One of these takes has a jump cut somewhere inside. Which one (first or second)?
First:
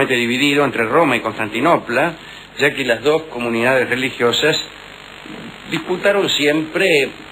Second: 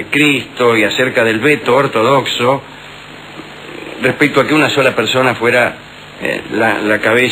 first